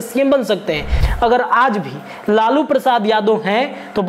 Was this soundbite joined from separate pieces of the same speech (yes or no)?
yes